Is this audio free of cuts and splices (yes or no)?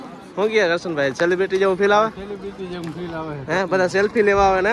yes